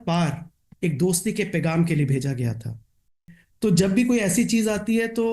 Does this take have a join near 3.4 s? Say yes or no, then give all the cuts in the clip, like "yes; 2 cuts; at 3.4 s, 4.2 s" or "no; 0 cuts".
yes; 1 cut; at 3.4 s